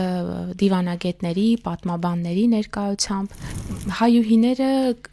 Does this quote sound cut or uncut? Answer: cut